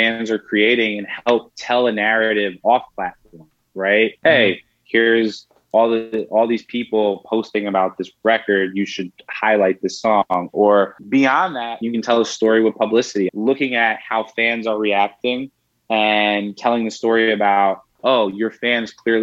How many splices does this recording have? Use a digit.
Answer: 3